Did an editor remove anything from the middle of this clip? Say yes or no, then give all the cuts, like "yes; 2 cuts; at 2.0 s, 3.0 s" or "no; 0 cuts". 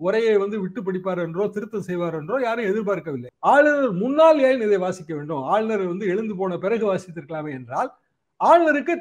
yes; 1 cut; at 3.2 s